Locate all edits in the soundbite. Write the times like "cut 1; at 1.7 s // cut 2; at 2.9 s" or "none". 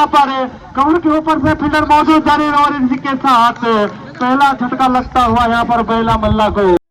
none